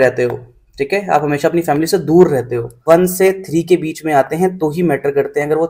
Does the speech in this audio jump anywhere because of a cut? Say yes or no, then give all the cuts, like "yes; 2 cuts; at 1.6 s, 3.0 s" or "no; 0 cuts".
yes; 1 cut; at 2.7 s